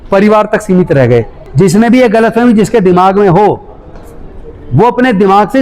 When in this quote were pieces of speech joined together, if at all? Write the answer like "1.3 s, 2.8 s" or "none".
1.4 s